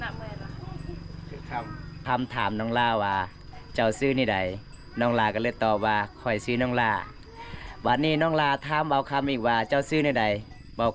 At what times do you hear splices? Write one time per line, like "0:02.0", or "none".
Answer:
0:02.0

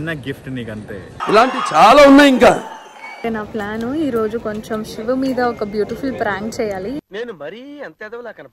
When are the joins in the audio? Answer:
0:03.2

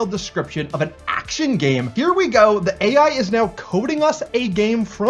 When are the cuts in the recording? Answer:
0:01.9

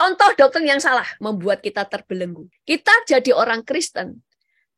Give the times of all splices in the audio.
0:01.1
0:02.5

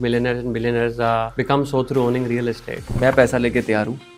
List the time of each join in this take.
0:01.3
0:02.9

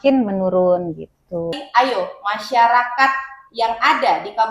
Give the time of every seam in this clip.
0:01.6

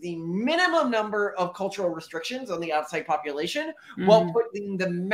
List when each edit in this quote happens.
none

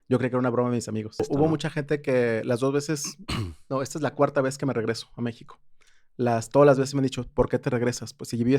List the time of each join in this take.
0:01.2

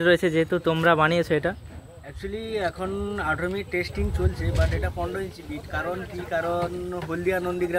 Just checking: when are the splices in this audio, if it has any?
none

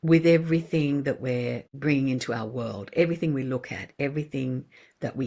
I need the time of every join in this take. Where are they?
0:01.7

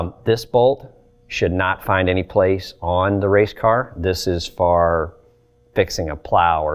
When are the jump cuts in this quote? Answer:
none

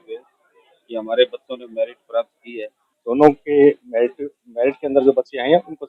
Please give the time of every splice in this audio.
0:03.0

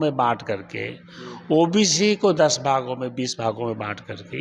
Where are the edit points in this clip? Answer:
none

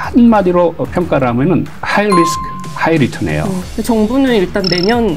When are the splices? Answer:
0:01.8
0:03.6

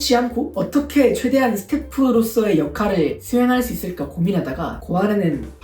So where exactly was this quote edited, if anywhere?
none

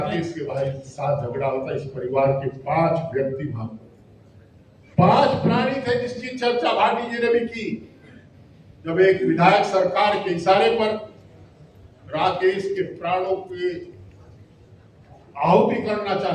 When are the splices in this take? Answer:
none

